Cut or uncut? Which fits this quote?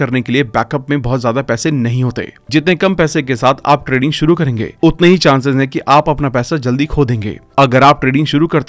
uncut